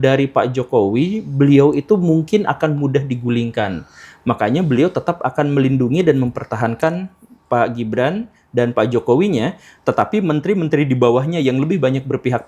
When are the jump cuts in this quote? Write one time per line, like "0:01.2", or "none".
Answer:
none